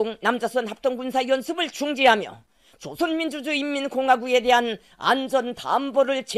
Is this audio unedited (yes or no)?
no